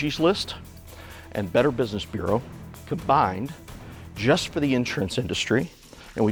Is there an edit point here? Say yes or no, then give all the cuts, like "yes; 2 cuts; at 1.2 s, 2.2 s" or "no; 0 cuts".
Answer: no; 0 cuts